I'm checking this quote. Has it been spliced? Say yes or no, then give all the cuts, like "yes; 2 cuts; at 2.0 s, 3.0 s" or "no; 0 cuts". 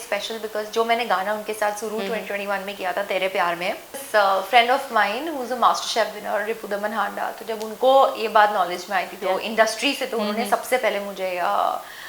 yes; 1 cut; at 4.0 s